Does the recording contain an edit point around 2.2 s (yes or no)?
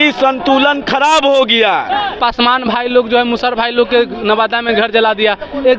yes